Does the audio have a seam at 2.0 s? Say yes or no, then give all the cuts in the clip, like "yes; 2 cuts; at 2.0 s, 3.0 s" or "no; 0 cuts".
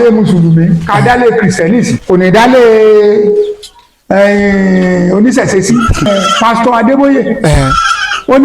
yes; 2 cuts; at 2.0 s, 6.1 s